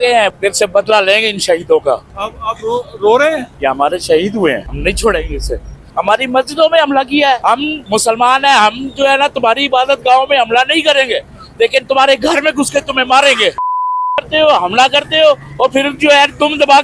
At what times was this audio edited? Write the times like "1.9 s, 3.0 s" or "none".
3.5 s, 4.7 s, 5.8 s, 7.6 s, 13.6 s

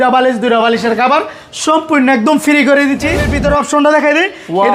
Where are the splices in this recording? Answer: 3.3 s

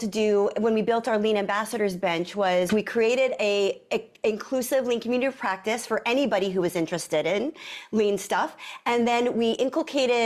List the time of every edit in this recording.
2.7 s

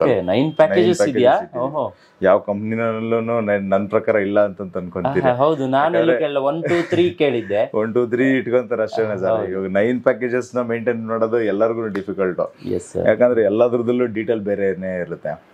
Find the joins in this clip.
none

